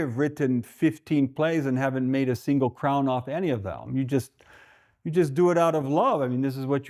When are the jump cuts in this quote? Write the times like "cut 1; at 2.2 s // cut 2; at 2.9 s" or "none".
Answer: none